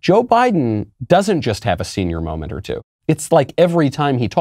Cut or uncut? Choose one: cut